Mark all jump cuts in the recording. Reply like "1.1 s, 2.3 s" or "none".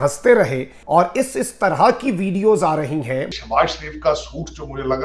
3.4 s